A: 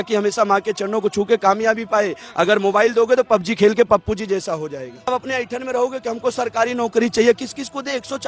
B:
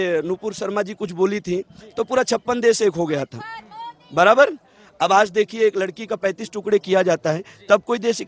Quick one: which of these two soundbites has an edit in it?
A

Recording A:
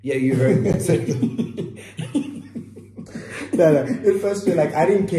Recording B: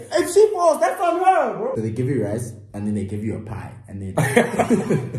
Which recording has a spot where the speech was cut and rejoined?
B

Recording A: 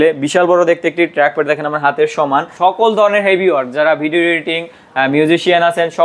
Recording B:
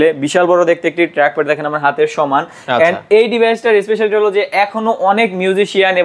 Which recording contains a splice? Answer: A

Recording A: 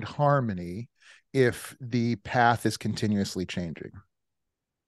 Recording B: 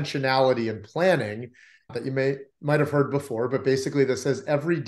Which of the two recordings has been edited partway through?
B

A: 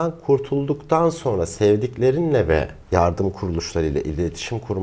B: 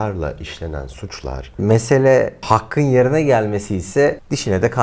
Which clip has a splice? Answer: B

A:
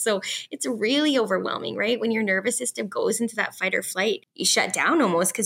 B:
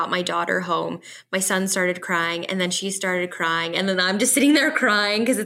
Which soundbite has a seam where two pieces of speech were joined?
A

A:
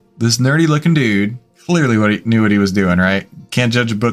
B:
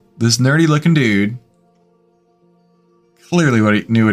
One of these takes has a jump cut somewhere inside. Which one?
A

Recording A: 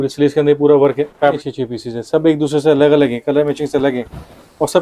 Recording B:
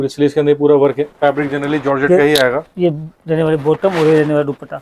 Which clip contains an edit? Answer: A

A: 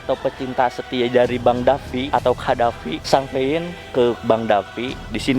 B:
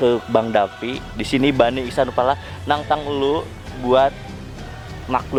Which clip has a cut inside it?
A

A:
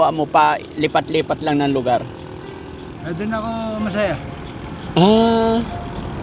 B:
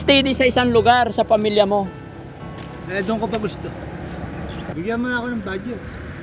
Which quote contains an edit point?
B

